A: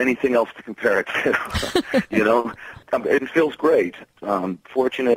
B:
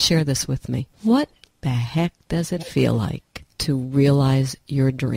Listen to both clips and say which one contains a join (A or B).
A